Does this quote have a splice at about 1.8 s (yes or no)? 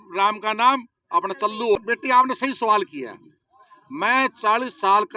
yes